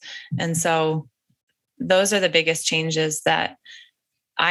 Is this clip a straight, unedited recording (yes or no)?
yes